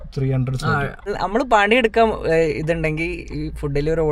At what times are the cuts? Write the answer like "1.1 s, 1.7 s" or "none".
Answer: 1.1 s